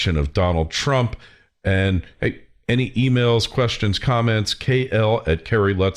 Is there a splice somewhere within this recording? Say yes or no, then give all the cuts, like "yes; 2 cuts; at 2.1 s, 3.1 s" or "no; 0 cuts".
yes; 1 cut; at 4.4 s